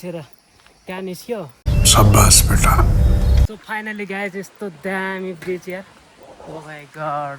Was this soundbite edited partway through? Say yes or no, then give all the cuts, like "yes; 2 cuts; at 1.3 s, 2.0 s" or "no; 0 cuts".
yes; 2 cuts; at 1.6 s, 3.6 s